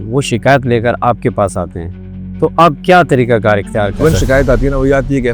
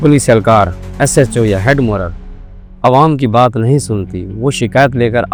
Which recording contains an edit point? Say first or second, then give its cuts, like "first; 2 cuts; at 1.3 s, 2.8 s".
first; 1 cut; at 4.0 s